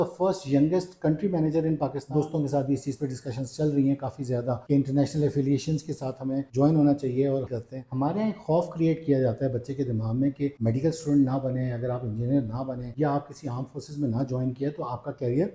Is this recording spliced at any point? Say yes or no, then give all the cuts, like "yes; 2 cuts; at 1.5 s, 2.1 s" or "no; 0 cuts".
yes; 3 cuts; at 2.1 s, 7.6 s, 10.6 s